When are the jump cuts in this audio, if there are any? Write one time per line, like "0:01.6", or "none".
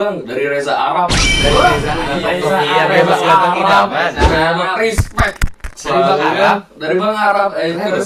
none